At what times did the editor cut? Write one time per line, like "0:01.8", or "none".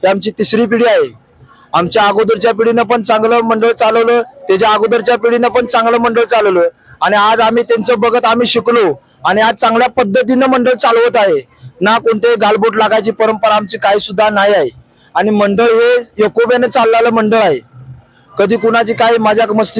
none